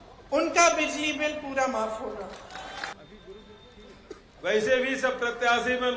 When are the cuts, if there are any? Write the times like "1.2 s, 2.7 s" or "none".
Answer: 2.9 s